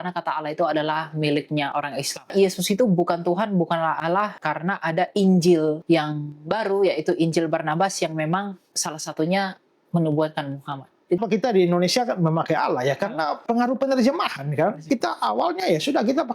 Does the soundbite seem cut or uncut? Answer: cut